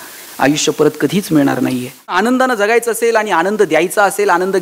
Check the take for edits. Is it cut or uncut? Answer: cut